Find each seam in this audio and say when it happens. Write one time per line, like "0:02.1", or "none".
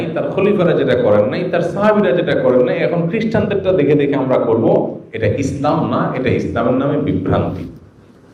none